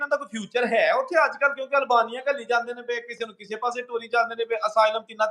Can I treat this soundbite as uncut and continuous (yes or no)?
yes